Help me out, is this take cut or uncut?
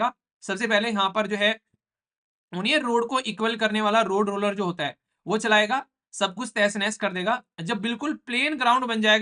uncut